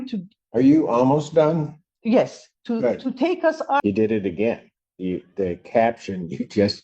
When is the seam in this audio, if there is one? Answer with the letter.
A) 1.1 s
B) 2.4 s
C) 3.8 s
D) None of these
C